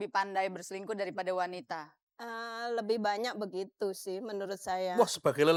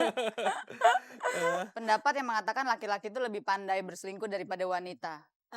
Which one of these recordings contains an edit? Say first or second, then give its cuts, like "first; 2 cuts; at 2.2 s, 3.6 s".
second; 1 cut; at 1.7 s